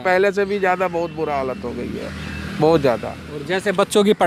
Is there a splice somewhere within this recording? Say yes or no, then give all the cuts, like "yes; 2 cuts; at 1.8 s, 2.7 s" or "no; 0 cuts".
no; 0 cuts